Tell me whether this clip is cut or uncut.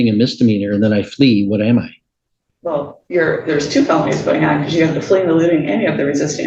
uncut